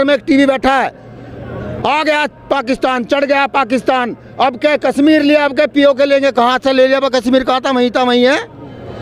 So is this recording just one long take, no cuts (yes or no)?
yes